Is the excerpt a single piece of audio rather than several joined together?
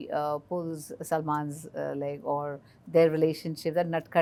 yes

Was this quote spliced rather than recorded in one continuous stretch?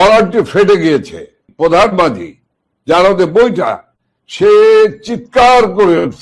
yes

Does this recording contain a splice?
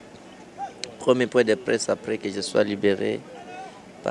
no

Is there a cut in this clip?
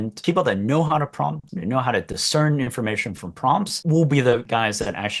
yes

